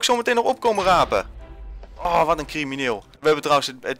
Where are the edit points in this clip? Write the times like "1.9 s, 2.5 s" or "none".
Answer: 3.1 s